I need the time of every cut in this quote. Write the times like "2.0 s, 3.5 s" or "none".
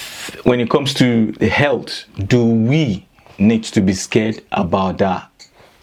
none